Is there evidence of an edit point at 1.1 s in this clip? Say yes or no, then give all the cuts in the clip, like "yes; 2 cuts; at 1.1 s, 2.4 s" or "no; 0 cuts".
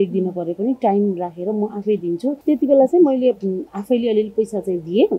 no; 1 cut; at 2.4 s